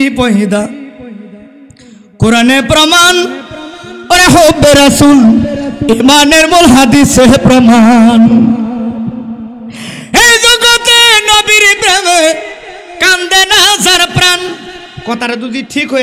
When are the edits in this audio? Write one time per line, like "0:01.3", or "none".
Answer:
none